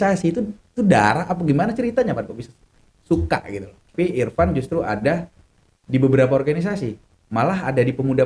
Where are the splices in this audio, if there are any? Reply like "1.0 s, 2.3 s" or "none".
3.9 s